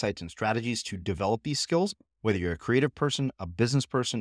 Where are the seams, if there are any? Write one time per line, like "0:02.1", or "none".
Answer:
none